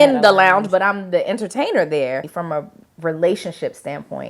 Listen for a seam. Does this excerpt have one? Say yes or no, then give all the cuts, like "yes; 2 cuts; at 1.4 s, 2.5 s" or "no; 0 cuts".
yes; 1 cut; at 2.3 s